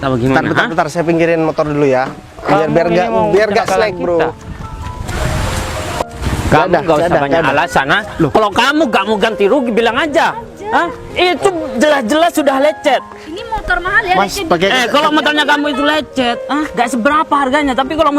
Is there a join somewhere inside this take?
yes; 1 cut; at 5.1 s

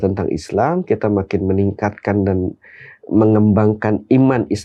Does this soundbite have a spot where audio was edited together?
no; 0 cuts

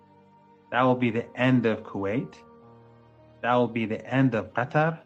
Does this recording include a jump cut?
no; 0 cuts

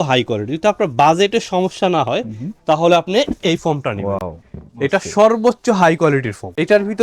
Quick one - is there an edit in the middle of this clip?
no; 0 cuts

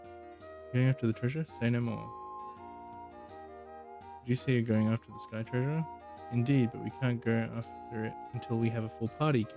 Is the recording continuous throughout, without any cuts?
yes; 0 cuts

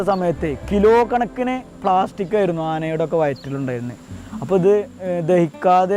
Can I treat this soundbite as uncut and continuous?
yes; 0 cuts

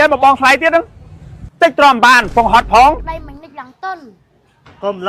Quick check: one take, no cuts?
no; 1 cut; at 3.0 s

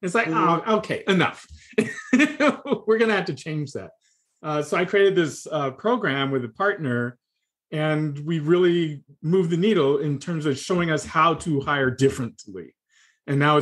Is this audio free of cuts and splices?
yes; 0 cuts

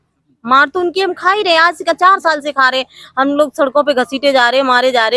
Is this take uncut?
yes; 0 cuts

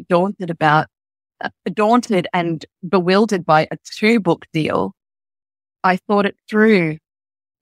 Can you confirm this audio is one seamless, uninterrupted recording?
no; 1 cut; at 5.7 s

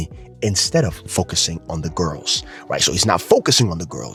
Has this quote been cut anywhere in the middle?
no; 0 cuts

